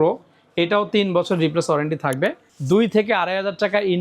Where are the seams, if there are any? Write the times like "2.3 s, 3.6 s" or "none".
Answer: 2.5 s

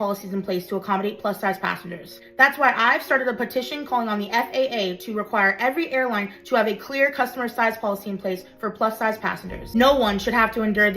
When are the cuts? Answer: 2.9 s, 9.5 s

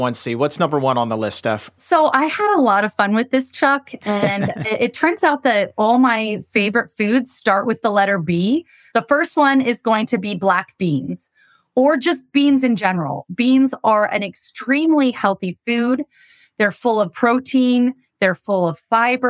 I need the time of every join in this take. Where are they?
1.8 s, 8.8 s

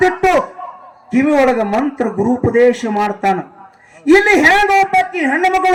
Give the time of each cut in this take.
none

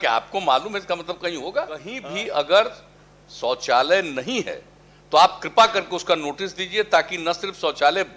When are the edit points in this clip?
1.9 s

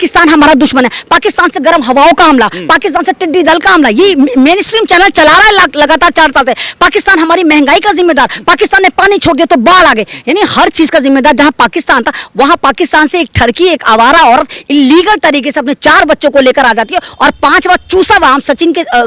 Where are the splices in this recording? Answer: none

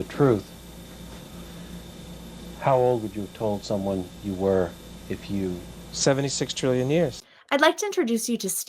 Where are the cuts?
7.1 s

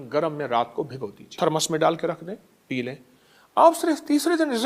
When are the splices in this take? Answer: 1.3 s

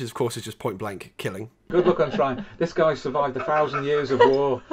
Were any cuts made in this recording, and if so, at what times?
1.7 s

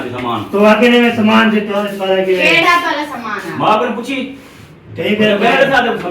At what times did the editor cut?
1.9 s

